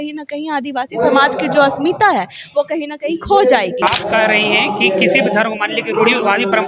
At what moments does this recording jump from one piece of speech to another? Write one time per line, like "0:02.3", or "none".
0:03.8